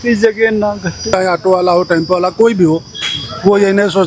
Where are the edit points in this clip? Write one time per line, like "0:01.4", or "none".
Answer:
0:01.0